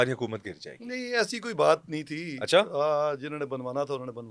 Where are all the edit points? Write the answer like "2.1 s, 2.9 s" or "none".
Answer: none